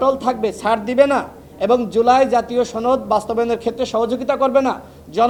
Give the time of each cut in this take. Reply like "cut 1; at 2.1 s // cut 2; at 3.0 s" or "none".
none